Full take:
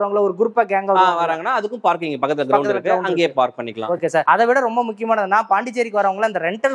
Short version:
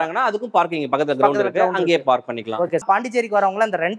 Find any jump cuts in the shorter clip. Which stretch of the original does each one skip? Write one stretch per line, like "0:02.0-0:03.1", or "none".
0:04.1-0:05.4